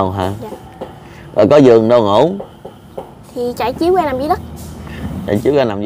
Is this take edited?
no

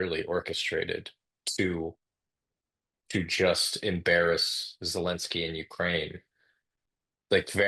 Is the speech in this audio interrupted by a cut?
no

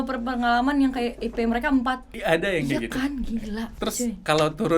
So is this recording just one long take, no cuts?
no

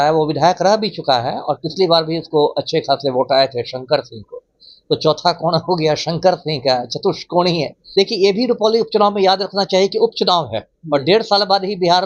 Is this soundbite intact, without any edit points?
no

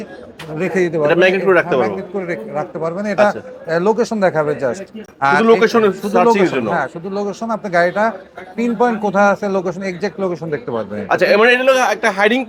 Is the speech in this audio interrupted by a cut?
no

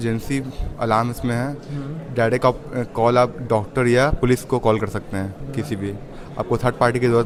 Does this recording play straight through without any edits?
yes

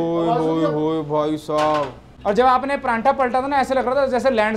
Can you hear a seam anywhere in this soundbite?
no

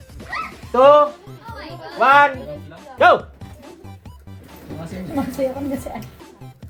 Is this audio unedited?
yes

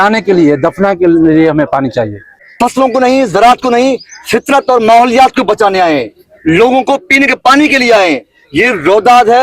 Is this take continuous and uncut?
no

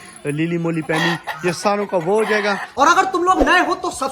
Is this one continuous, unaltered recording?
no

